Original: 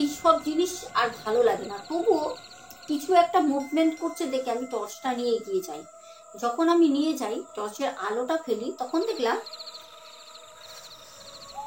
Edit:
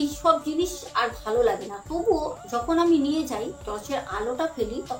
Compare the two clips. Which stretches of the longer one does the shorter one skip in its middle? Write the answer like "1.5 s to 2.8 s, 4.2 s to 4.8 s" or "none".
2.4 s to 6.3 s